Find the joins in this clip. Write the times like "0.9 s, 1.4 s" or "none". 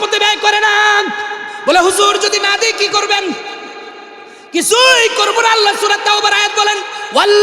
1.4 s